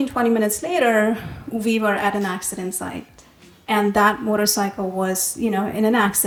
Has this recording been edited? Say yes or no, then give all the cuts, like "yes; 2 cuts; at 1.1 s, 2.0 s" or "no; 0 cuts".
no; 0 cuts